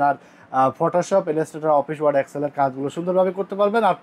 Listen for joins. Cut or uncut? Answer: uncut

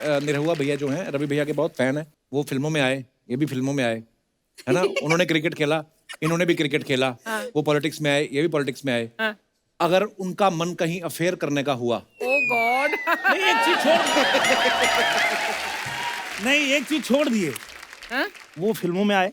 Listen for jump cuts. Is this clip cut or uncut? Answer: cut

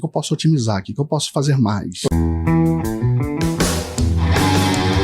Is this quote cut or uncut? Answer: cut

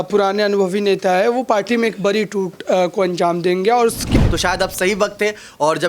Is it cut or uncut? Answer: cut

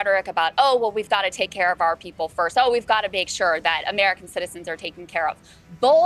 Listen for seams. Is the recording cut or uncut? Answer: uncut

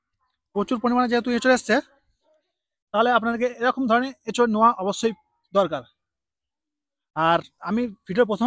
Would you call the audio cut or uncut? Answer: uncut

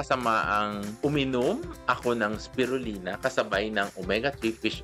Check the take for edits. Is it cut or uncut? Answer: cut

